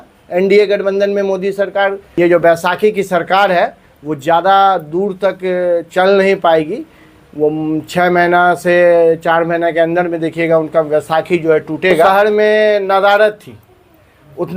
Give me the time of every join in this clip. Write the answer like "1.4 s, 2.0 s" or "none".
2.0 s, 12.1 s

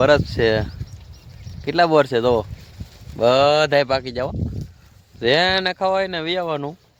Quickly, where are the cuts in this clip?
none

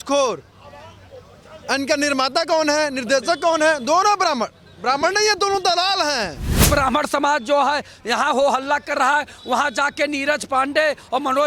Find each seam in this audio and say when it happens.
6.7 s

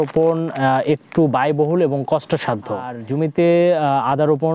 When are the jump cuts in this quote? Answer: 3.0 s

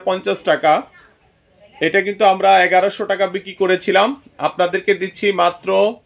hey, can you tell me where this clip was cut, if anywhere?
none

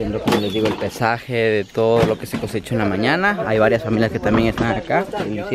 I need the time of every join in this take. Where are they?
none

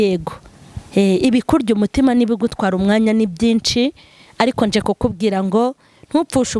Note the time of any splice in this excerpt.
none

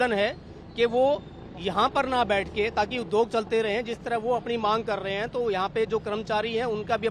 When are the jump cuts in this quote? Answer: none

